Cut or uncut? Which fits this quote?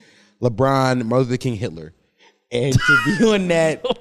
uncut